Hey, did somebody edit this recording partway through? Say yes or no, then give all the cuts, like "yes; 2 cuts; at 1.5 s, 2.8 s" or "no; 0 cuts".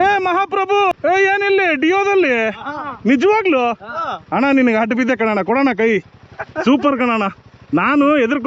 yes; 1 cut; at 0.9 s